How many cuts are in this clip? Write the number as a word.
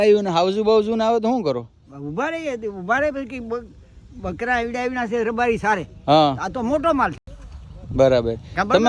zero